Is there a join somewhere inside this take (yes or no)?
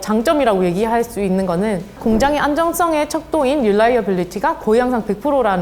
no